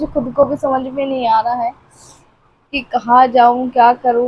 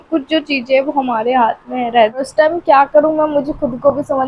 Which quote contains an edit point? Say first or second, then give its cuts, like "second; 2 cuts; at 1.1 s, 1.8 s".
second; 1 cut; at 2.1 s